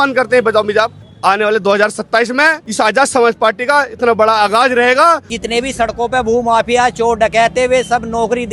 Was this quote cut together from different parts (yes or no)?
yes